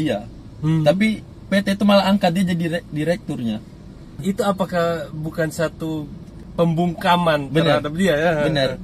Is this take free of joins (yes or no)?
no